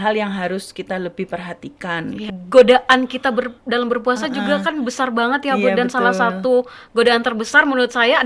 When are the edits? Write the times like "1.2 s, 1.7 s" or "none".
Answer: 2.3 s